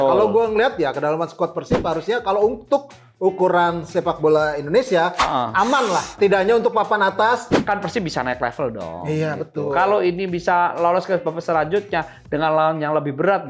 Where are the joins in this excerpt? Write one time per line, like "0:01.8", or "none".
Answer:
0:06.1
0:07.5

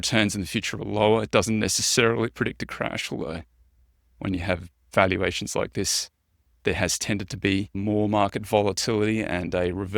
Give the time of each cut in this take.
0:07.8

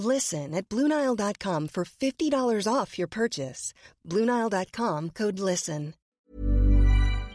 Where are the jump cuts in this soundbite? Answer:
0:06.1

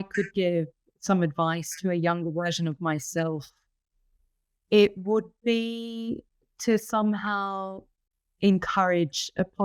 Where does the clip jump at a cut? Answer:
none

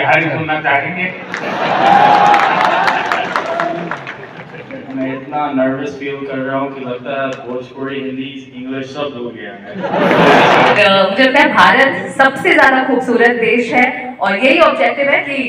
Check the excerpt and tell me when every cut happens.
0:10.8

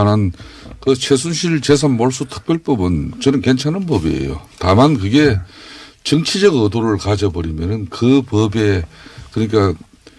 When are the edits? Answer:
none

